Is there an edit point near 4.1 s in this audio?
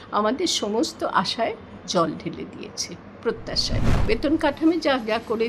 yes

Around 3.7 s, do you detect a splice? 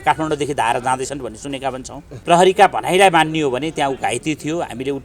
no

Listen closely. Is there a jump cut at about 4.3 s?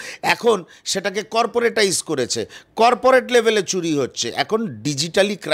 no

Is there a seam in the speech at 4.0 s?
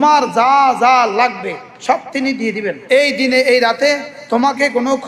no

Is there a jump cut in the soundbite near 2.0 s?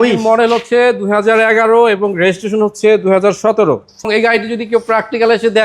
no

